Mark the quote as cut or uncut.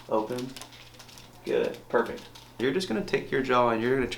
cut